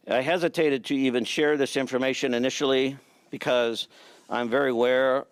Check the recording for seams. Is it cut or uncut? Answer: uncut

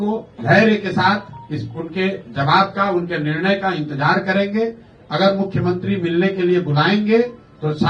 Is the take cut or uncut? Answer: uncut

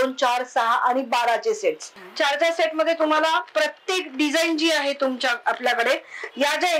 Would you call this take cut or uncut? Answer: cut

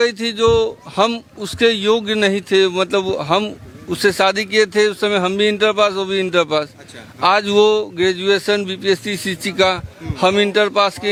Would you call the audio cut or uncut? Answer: uncut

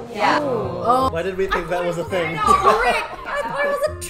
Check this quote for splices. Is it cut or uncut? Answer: cut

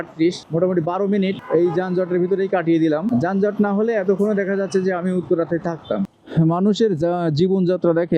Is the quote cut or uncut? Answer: cut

